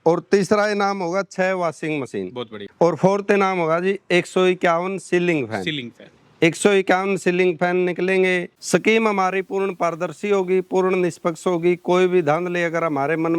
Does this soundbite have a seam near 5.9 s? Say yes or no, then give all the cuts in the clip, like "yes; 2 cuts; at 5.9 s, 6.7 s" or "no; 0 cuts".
no; 2 cuts; at 2.6 s, 8.5 s